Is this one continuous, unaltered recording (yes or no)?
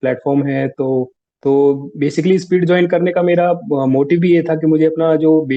no